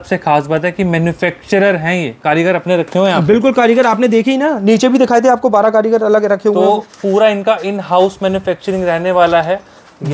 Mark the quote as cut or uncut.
uncut